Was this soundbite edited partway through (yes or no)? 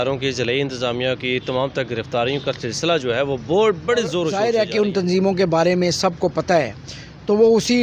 yes